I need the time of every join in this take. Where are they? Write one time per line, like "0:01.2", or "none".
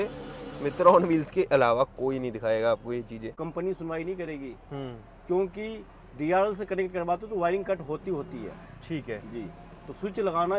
0:03.3